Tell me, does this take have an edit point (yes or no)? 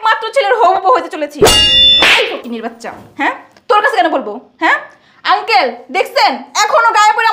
yes